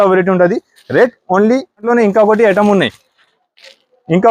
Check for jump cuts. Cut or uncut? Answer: cut